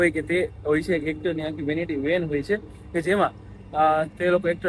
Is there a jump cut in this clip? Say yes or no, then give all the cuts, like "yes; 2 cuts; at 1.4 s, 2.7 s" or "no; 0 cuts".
no; 0 cuts